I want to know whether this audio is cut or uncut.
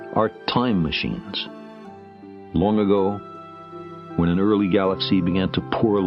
uncut